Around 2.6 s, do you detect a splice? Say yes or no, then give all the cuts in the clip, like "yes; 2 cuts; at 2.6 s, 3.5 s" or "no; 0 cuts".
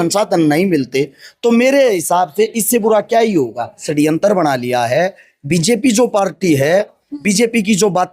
no; 1 cut; at 3.9 s